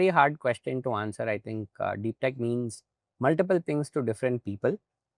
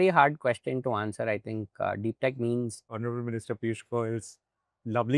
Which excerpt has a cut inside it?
second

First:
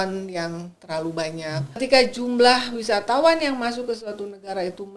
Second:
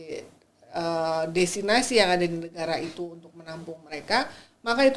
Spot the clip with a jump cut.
first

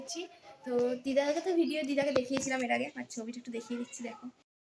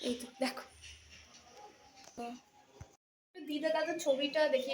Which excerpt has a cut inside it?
second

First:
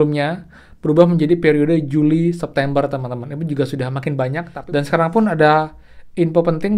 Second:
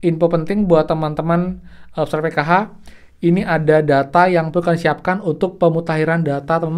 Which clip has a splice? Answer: first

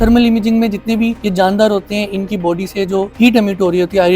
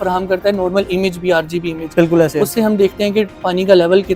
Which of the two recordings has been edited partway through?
first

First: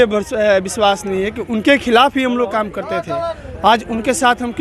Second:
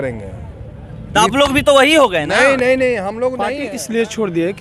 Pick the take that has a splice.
second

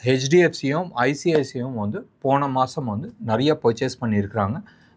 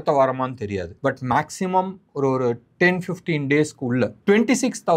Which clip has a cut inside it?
second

